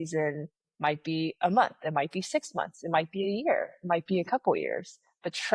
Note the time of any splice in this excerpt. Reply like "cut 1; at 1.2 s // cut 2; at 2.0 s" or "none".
none